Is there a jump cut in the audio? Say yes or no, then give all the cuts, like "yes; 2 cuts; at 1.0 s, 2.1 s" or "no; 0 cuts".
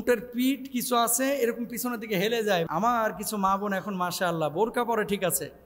yes; 1 cut; at 2.7 s